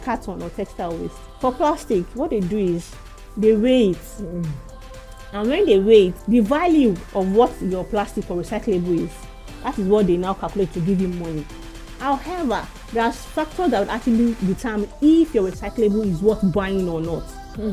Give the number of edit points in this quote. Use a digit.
3